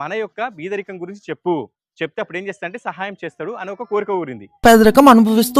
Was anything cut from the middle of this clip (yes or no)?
no